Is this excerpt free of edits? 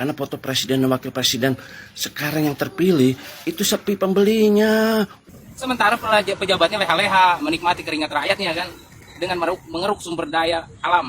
no; 1 cut; at 5.2 s

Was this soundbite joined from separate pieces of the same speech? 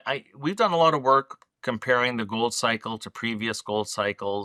no; 0 cuts

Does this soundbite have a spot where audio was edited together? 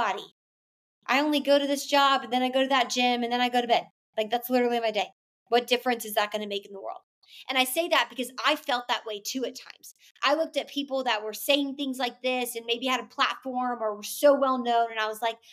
no; 0 cuts

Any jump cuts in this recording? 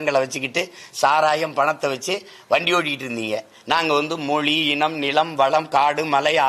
no; 0 cuts

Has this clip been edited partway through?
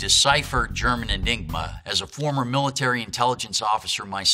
yes; 1 cut; at 1.7 s

